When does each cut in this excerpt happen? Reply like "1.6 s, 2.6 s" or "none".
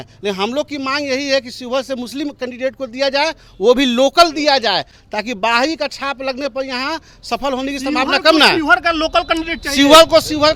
none